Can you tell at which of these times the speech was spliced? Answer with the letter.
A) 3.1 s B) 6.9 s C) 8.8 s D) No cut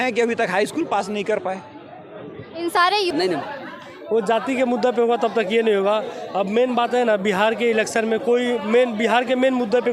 A